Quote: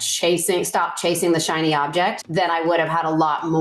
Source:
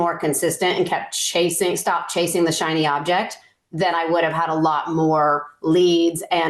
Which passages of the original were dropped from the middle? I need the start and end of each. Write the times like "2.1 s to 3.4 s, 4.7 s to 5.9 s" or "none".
3.3 s to 3.7 s